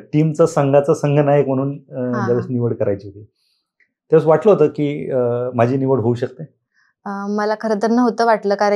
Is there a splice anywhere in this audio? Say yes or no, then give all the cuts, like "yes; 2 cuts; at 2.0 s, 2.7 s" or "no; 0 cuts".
no; 0 cuts